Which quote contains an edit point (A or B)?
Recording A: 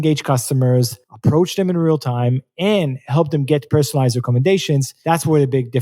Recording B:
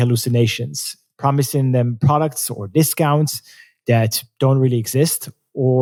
A